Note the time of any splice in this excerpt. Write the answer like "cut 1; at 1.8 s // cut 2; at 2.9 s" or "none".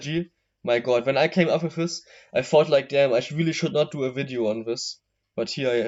none